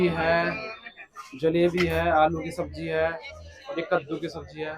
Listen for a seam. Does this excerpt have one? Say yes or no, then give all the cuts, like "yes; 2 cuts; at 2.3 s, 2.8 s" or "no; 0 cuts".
no; 0 cuts